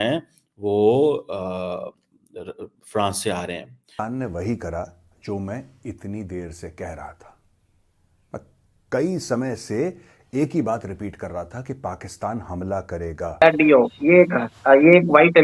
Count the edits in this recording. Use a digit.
2